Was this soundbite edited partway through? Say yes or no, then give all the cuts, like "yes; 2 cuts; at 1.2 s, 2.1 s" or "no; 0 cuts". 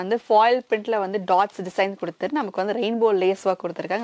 no; 0 cuts